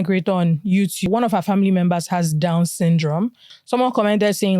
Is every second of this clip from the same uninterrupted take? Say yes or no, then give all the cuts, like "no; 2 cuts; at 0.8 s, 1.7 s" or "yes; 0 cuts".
no; 2 cuts; at 1.1 s, 3.5 s